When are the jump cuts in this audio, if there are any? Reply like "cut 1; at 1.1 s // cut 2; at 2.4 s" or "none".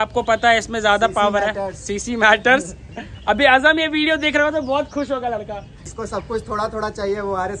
cut 1; at 5.8 s